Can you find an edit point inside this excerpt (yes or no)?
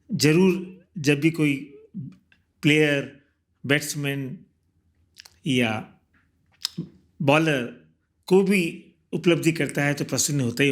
no